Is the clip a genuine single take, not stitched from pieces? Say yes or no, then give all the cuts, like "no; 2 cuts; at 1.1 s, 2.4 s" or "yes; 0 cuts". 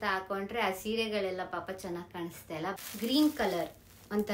no; 1 cut; at 2.7 s